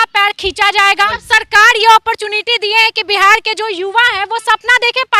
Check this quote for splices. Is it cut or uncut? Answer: cut